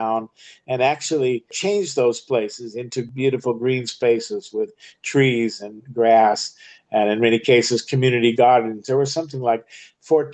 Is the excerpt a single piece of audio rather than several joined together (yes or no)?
no